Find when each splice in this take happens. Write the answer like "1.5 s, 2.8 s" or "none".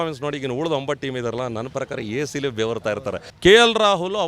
3.2 s